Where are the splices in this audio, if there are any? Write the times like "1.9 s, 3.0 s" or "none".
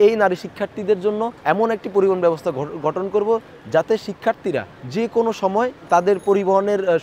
1.3 s, 4.8 s